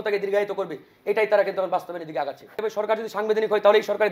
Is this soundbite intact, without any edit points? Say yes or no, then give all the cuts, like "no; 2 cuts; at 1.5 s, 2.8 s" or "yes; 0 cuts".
no; 1 cut; at 2.7 s